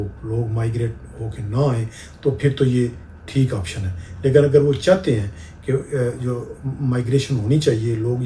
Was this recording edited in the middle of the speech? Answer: no; 0 cuts

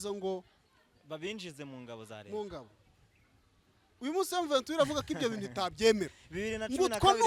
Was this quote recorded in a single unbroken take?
yes; 0 cuts

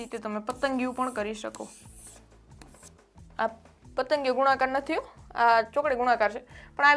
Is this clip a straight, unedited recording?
yes; 0 cuts

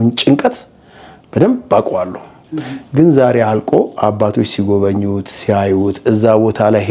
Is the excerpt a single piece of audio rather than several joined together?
yes; 0 cuts

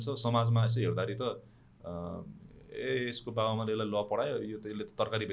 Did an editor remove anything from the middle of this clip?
no; 0 cuts

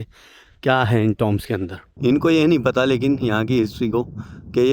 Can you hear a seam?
yes; 1 cut; at 1.8 s

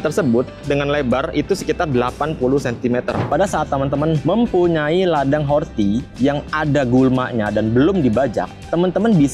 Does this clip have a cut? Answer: yes; 1 cut; at 3.2 s

